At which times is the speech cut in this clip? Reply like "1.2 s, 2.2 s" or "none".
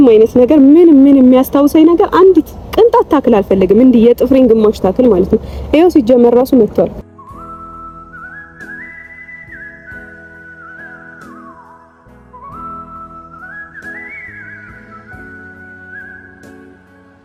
none